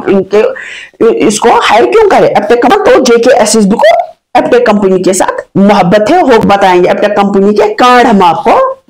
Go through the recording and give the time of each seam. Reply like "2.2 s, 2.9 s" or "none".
2.7 s, 6.4 s, 7.4 s

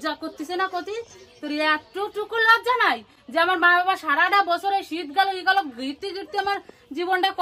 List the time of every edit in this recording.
none

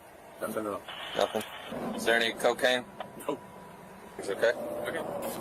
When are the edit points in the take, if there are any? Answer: 1.7 s, 4.3 s

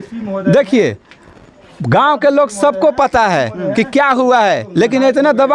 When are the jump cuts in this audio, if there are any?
none

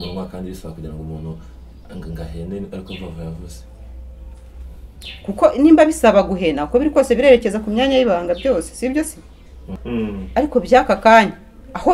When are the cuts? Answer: 9.8 s

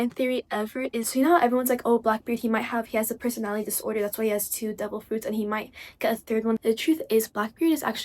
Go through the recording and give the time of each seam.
1.1 s, 6.6 s

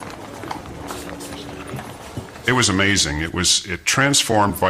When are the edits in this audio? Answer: 1.9 s

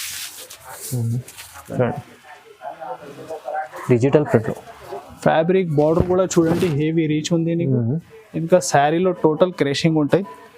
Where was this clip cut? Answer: 1.7 s

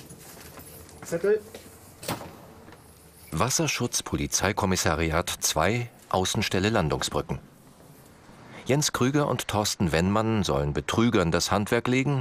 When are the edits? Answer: none

